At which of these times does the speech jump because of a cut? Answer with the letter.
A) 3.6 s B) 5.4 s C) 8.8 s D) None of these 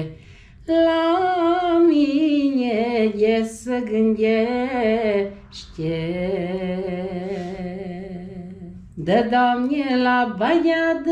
C